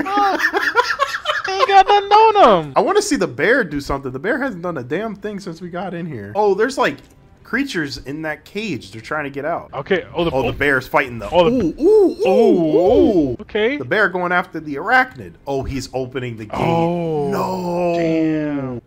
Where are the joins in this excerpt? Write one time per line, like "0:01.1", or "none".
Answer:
none